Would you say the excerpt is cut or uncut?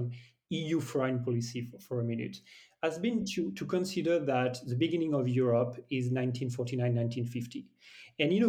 uncut